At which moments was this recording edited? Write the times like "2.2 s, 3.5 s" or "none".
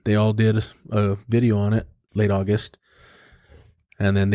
2.0 s